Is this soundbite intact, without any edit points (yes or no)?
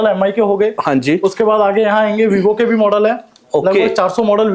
yes